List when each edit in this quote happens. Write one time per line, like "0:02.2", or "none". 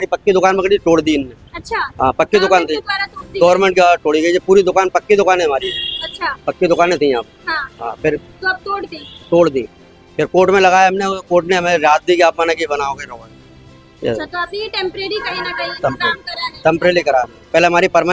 none

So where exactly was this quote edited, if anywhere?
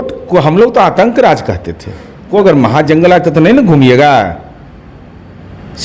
0:02.3

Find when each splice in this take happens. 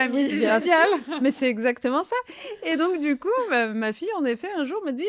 none

